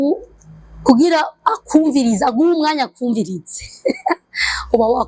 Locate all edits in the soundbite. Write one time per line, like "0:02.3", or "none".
none